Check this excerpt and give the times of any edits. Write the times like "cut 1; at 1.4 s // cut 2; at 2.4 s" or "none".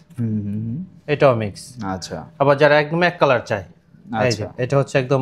none